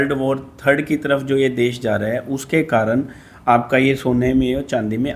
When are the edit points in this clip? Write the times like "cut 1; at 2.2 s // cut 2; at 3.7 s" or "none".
none